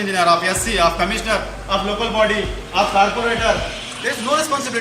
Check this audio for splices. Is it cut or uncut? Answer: uncut